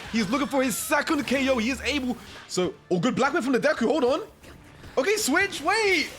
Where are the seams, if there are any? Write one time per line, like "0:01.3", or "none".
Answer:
0:02.3